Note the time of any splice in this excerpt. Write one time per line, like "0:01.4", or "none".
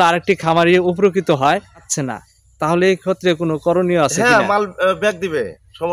0:01.9